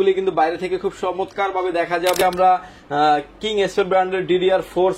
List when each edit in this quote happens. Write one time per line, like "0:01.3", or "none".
0:02.2